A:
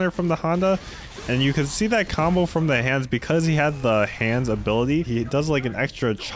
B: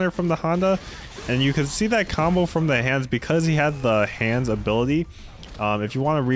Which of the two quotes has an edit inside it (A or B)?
A